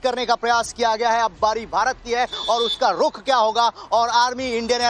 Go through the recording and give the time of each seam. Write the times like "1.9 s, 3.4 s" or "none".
2.4 s